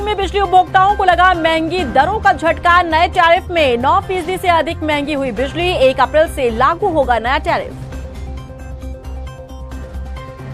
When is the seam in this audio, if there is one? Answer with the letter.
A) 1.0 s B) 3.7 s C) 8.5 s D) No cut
D